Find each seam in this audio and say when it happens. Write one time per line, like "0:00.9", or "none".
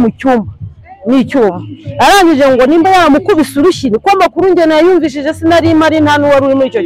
none